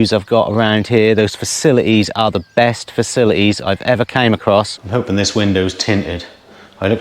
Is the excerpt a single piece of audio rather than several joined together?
no; 1 cut; at 4.8 s

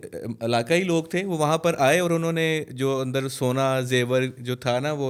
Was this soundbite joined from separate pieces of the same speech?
no; 0 cuts

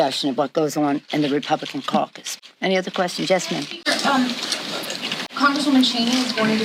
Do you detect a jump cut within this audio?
no; 0 cuts

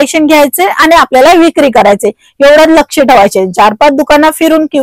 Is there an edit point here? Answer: no; 0 cuts

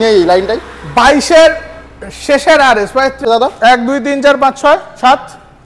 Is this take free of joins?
no; 1 cut; at 3.2 s

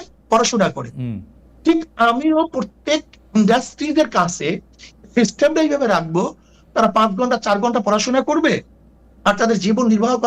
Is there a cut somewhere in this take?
no; 0 cuts

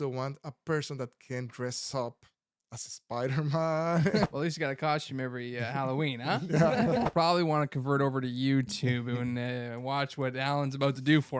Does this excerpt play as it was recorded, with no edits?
no; 2 cuts; at 4.3 s, 7.1 s

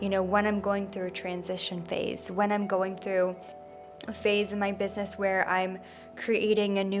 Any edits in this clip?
no; 0 cuts

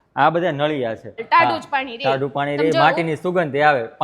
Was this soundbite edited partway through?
yes; 1 cut; at 1.2 s

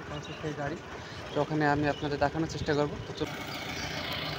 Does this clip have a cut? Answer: yes; 2 cuts; at 1.3 s, 3.3 s

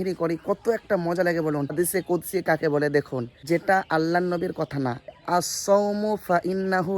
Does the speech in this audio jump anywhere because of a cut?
yes; 2 cuts; at 1.7 s, 5.1 s

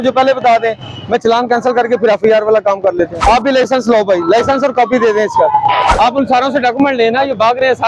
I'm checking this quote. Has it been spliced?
yes; 2 cuts; at 3.1 s, 5.9 s

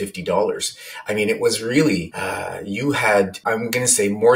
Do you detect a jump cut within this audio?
yes; 2 cuts; at 2.2 s, 3.4 s

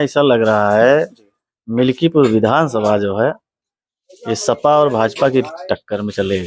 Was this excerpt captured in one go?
yes; 0 cuts

